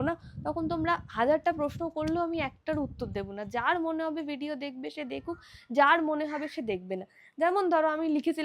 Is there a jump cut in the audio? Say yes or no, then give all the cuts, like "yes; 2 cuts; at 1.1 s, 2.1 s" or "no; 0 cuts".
no; 0 cuts